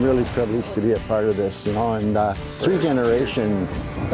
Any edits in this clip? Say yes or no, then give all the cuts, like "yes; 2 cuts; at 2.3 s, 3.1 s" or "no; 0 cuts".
no; 0 cuts